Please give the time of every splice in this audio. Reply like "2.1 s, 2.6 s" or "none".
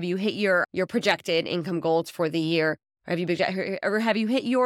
none